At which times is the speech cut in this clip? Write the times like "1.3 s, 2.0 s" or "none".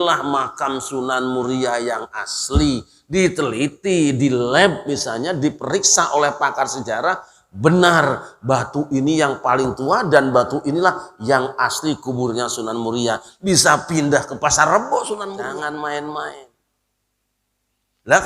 15.4 s